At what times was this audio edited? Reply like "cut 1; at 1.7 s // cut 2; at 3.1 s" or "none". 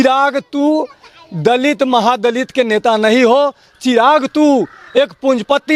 none